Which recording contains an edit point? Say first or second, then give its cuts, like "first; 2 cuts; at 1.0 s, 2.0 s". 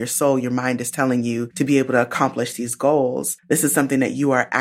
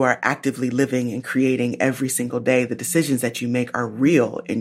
first; 2 cuts; at 1.5 s, 3.3 s